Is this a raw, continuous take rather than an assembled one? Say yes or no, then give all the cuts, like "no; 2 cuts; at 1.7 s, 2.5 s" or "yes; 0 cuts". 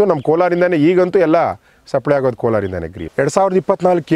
no; 1 cut; at 3.0 s